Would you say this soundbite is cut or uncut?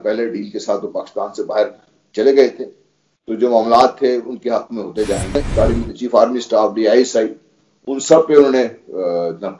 cut